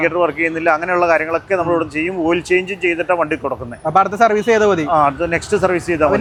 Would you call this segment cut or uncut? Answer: uncut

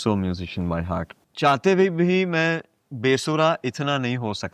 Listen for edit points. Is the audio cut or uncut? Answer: cut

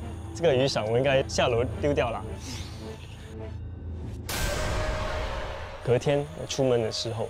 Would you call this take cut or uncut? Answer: cut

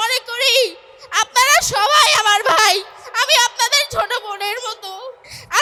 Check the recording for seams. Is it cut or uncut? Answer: uncut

